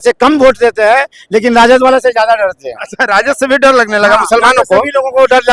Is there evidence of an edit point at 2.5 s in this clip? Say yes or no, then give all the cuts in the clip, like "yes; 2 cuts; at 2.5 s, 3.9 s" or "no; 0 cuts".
no; 0 cuts